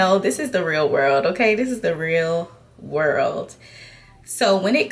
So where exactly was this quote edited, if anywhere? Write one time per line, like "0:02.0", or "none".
none